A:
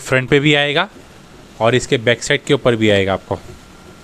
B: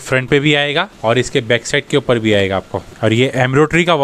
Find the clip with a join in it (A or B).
B